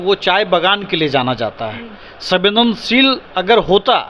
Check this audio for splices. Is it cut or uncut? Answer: uncut